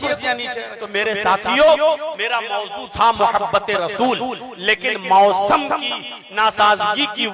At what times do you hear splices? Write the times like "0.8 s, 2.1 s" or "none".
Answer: 0.9 s